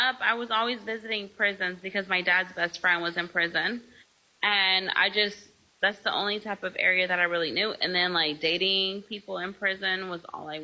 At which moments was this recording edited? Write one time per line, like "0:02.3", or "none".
none